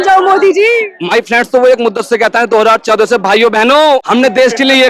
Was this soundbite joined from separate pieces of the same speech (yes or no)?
yes